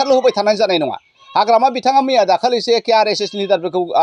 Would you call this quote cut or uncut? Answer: uncut